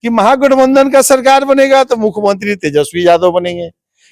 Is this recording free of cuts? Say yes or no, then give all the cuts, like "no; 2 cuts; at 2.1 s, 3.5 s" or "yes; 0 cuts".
yes; 0 cuts